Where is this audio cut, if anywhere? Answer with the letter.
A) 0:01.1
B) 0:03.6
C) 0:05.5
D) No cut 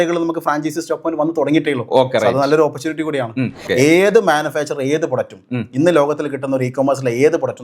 B